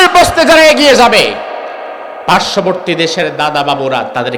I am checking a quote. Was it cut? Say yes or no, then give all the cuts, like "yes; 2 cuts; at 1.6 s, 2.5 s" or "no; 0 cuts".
no; 0 cuts